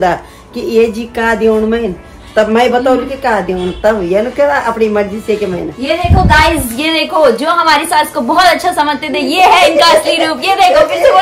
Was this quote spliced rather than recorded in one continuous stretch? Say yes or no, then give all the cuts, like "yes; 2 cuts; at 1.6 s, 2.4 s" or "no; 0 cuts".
no; 0 cuts